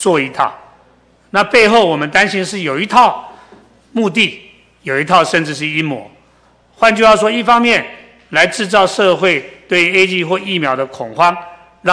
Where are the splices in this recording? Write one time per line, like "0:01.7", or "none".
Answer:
none